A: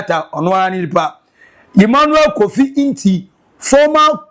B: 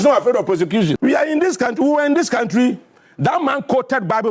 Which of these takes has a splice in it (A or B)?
B